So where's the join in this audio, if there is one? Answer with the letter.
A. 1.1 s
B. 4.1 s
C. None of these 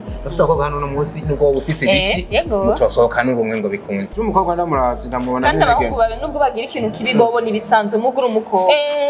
B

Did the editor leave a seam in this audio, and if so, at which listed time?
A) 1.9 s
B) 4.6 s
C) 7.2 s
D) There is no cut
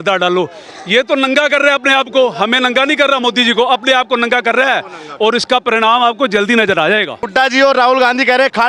C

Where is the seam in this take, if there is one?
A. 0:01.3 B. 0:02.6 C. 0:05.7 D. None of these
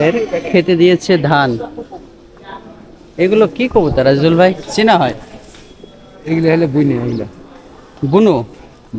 D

